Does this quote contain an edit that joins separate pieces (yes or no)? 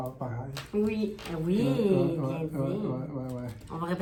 no